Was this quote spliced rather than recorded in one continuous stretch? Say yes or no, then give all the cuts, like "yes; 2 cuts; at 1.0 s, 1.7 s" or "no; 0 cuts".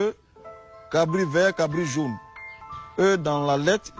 yes; 1 cut; at 3.0 s